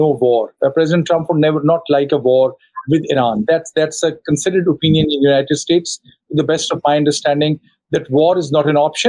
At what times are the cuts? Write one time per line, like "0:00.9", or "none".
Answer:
none